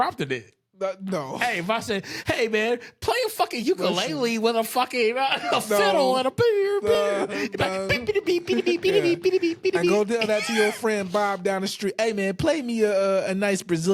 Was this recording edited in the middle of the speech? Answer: no; 0 cuts

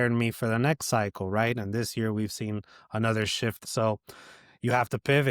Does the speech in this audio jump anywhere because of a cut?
yes; 1 cut; at 3.6 s

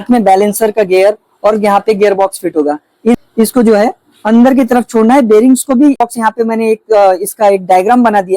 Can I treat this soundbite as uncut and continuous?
no; 2 cuts; at 3.1 s, 6.0 s

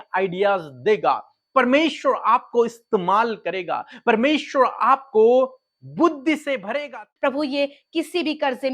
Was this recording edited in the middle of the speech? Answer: yes; 1 cut; at 6.8 s

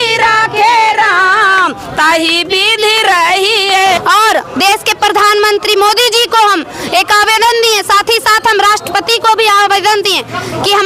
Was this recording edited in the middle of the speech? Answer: yes; 1 cut; at 4.0 s

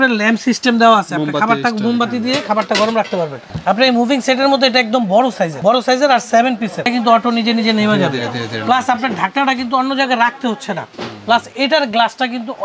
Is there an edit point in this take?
yes; 2 cuts; at 3.4 s, 6.8 s

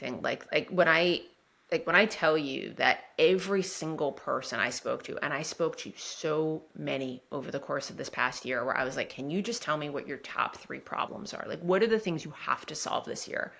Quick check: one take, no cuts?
yes; 0 cuts

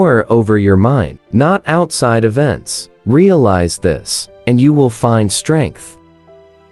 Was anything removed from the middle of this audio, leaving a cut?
no; 0 cuts

